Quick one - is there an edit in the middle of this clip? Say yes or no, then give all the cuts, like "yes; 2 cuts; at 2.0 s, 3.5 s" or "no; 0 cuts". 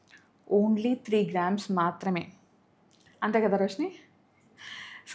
no; 0 cuts